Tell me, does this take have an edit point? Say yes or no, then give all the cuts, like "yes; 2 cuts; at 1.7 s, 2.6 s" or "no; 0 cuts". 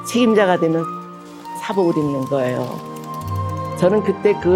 no; 0 cuts